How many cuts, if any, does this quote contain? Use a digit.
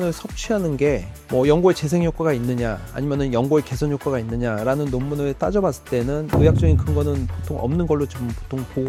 0